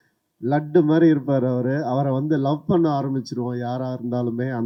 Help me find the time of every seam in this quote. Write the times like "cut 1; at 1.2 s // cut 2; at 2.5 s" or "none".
none